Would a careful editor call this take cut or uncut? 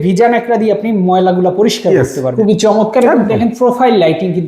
cut